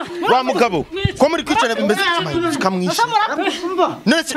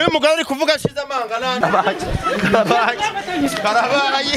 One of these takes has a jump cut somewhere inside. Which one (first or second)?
second